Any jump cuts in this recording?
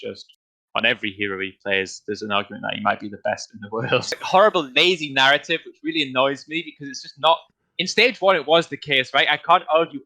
yes; 1 cut; at 4.2 s

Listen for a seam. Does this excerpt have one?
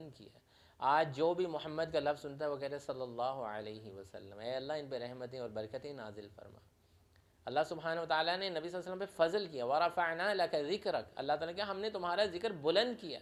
no; 0 cuts

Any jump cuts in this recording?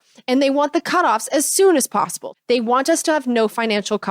yes; 1 cut; at 2.2 s

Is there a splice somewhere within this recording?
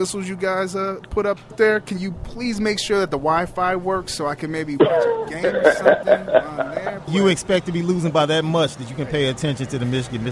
yes; 2 cuts; at 1.5 s, 7.0 s

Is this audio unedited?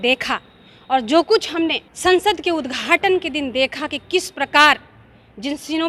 yes; 0 cuts

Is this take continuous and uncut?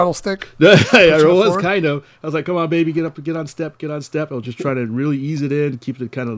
yes; 0 cuts

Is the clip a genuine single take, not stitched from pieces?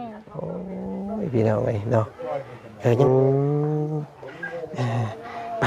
no; 1 cut; at 3.0 s

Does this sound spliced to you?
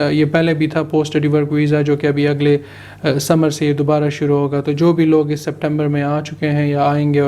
no; 0 cuts

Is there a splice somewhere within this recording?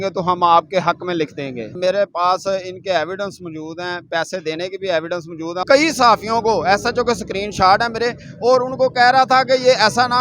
yes; 2 cuts; at 1.7 s, 5.6 s

